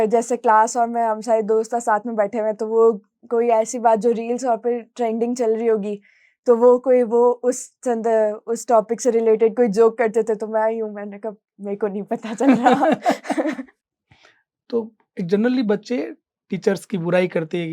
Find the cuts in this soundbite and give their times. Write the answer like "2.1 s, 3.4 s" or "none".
13.7 s